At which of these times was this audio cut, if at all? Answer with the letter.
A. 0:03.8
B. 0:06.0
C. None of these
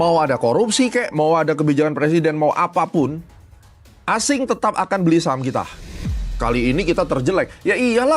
B